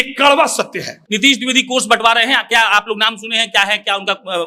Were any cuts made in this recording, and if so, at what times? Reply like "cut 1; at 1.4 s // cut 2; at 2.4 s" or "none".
cut 1; at 1.0 s